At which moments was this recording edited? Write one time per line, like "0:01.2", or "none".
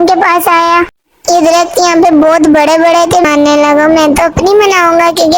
0:03.2